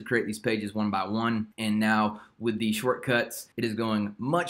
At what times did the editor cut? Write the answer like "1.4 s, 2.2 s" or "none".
none